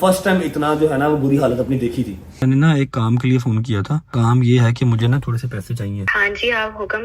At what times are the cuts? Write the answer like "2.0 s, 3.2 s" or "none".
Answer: 2.4 s, 4.1 s, 6.1 s